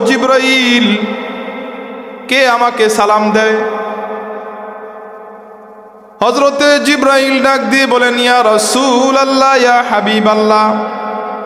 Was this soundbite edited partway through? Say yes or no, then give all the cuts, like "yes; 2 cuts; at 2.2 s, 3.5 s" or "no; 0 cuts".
no; 0 cuts